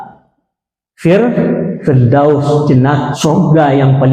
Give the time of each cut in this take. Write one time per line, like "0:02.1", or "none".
0:03.1

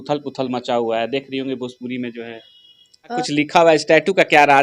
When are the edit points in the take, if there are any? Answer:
0:03.2

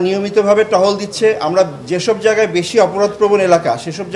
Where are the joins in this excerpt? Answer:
none

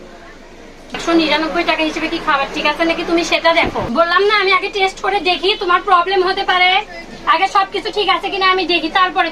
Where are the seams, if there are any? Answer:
0:01.0
0:03.9

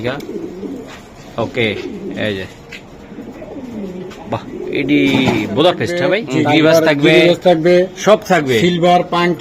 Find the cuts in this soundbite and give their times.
0:06.2

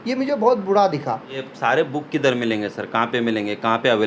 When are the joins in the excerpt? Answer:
0:01.3

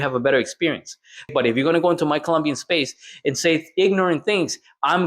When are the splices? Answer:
0:01.3

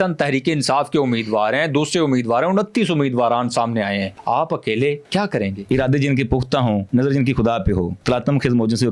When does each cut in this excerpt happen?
0:04.1
0:05.4
0:06.8
0:08.0

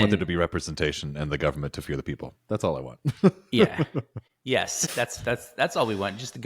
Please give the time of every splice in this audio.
0:04.8

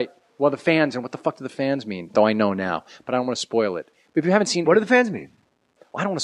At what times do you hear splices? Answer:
0:01.8

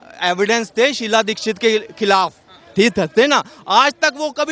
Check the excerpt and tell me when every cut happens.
none

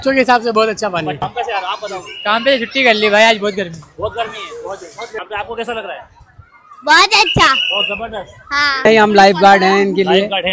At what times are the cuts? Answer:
0:01.2
0:05.2
0:08.9

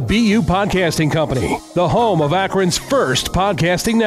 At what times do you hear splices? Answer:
none

